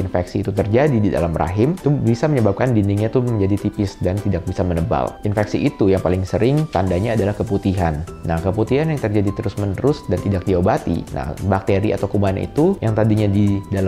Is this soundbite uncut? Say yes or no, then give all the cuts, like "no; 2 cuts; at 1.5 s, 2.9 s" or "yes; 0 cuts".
yes; 0 cuts